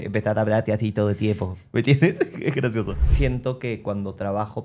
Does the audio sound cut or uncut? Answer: cut